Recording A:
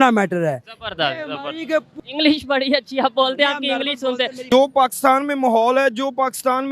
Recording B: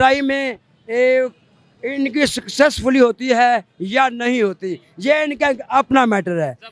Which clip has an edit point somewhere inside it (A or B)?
A